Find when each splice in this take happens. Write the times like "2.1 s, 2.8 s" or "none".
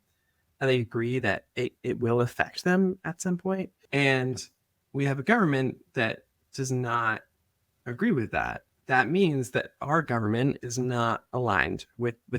3.8 s, 8.7 s